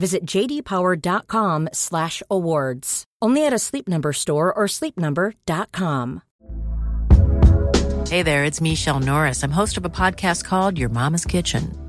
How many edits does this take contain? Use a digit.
1